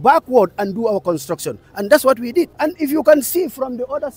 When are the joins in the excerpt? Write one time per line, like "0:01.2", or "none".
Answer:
0:02.5